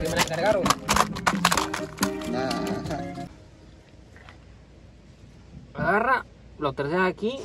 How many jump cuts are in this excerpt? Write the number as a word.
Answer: one